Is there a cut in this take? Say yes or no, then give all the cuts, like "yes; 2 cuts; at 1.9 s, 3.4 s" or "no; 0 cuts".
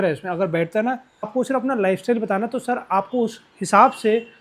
yes; 1 cut; at 1.3 s